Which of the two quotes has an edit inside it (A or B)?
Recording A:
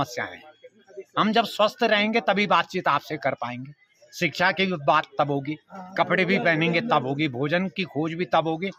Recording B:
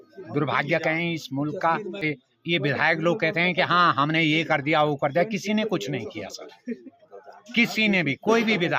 B